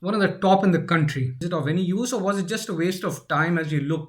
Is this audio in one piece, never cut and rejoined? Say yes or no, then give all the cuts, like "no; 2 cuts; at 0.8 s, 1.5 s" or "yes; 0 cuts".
no; 1 cut; at 1.4 s